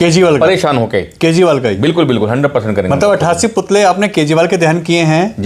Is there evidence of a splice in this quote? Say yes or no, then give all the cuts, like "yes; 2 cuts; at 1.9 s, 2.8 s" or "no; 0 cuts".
no; 0 cuts